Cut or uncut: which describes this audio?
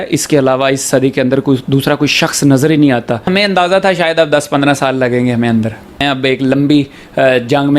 cut